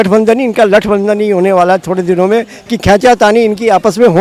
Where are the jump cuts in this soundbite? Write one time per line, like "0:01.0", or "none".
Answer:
none